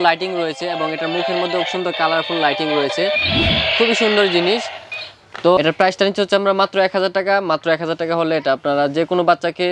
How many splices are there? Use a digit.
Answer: 1